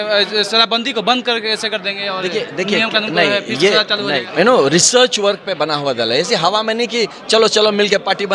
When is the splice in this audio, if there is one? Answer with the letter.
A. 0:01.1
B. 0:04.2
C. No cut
B